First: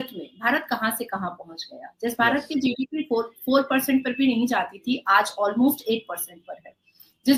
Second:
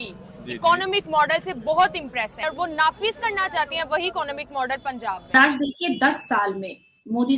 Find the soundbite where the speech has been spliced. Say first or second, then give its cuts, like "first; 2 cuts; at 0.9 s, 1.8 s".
second; 2 cuts; at 2.4 s, 5.3 s